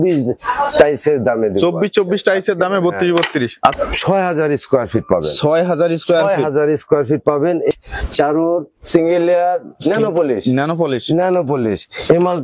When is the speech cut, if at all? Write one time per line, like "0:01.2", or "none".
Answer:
0:03.7
0:07.7